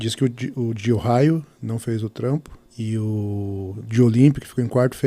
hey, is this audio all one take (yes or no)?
no